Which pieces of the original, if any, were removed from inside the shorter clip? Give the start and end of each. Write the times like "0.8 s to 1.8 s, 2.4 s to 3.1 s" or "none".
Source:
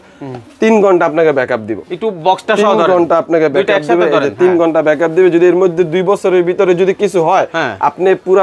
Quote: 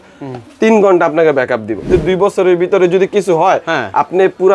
1.9 s to 5.7 s